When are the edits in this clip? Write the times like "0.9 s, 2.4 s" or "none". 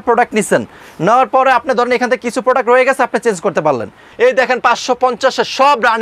4.0 s